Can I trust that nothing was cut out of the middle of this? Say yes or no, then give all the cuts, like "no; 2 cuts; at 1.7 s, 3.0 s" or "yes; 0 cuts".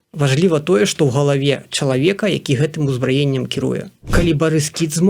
no; 1 cut; at 4.0 s